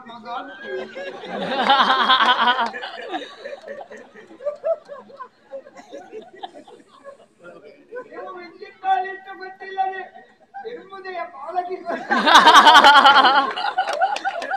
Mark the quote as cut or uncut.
uncut